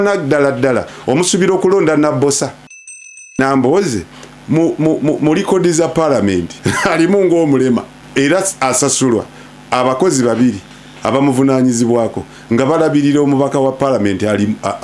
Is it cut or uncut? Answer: cut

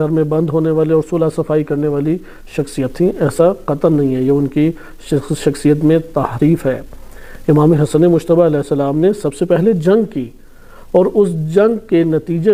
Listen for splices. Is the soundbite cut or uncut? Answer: uncut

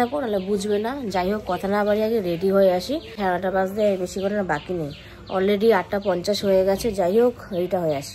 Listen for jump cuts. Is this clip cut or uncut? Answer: uncut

